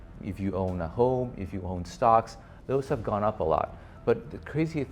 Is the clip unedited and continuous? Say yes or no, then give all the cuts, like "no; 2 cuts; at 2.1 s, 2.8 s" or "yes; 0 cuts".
no; 1 cut; at 3.8 s